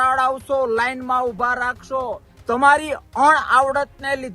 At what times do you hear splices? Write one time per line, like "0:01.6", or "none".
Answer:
0:02.3